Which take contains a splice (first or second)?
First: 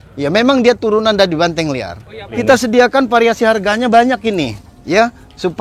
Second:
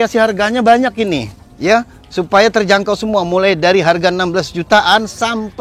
first